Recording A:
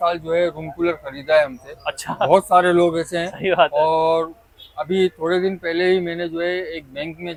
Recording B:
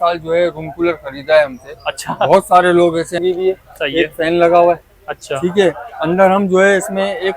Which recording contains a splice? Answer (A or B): B